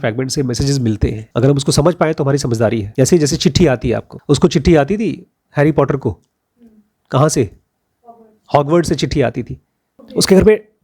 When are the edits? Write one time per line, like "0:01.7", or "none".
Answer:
0:01.2
0:02.9
0:04.1